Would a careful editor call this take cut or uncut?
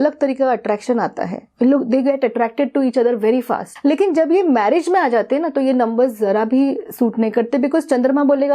cut